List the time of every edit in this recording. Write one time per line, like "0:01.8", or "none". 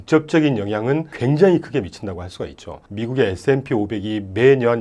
0:02.8